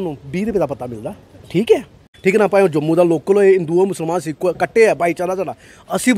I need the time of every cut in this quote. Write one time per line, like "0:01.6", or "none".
0:02.1